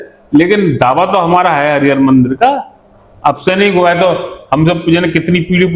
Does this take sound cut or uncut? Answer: uncut